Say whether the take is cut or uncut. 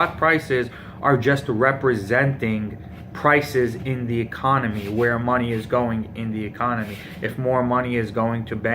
cut